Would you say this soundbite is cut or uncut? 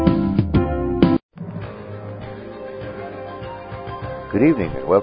cut